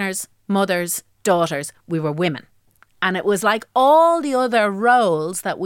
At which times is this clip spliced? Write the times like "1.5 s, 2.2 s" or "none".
none